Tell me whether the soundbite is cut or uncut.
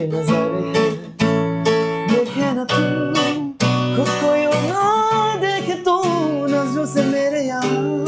uncut